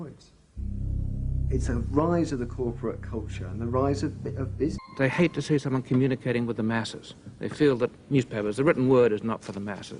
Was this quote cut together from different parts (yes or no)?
no